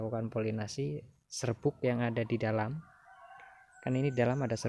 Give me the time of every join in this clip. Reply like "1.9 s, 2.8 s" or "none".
none